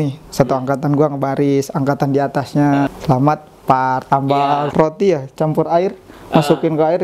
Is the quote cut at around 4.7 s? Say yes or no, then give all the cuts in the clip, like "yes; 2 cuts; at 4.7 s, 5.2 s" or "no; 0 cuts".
yes; 2 cuts; at 2.9 s, 4.7 s